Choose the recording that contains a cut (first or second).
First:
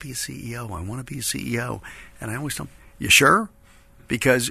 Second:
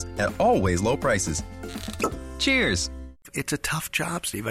second